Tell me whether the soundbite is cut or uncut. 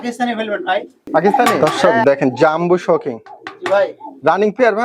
cut